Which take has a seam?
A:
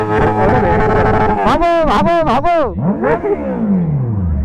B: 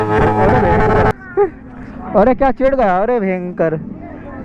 B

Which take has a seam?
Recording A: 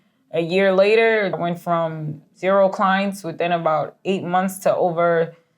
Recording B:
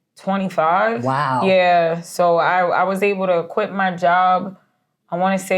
A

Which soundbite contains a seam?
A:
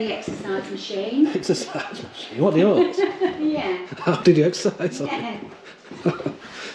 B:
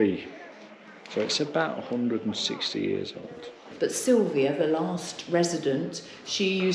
B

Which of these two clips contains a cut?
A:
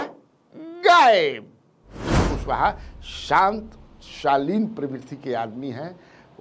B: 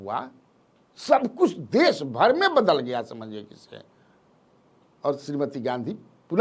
A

